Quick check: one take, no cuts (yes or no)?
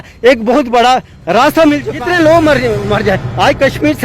no